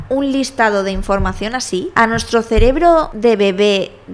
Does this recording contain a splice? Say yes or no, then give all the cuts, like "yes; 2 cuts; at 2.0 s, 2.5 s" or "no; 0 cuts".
yes; 2 cuts; at 1.9 s, 3.1 s